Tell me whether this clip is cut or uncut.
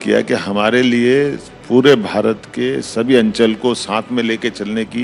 uncut